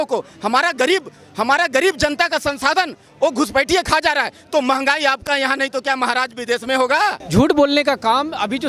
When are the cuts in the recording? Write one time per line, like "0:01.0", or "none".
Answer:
0:07.2